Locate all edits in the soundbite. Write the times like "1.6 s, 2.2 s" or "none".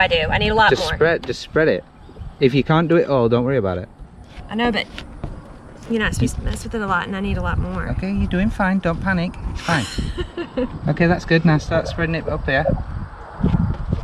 none